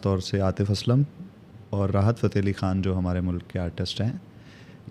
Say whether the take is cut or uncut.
uncut